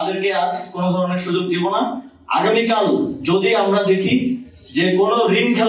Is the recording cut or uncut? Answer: uncut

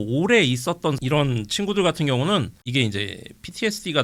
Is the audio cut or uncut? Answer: uncut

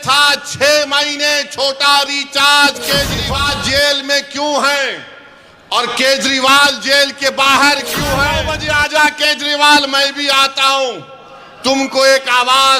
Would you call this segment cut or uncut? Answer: cut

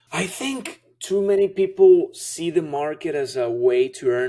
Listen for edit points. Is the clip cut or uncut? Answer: uncut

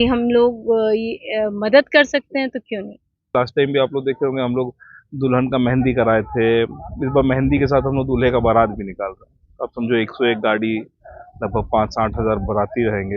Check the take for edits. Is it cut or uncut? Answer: cut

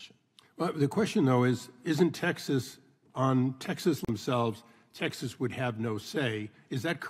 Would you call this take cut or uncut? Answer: uncut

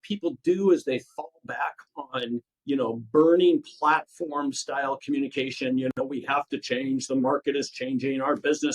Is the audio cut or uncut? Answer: uncut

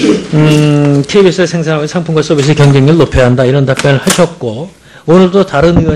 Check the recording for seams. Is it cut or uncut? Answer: uncut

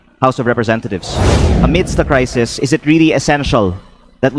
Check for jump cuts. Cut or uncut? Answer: cut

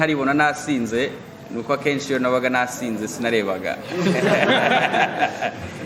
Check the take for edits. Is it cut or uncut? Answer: uncut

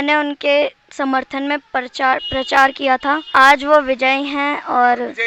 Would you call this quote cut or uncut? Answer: uncut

